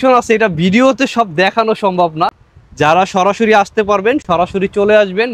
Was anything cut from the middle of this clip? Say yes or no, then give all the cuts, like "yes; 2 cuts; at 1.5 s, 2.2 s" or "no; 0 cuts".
no; 0 cuts